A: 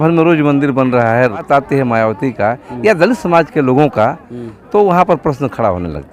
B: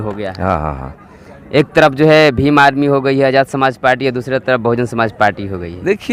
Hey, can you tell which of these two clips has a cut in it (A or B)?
A